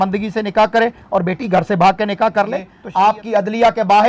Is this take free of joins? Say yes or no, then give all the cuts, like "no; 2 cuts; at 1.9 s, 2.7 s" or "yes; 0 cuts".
no; 1 cut; at 2.8 s